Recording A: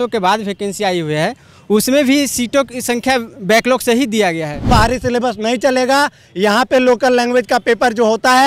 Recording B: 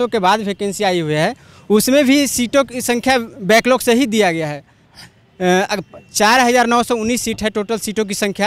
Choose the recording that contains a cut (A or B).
A